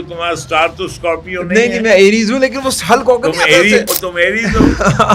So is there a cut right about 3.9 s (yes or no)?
yes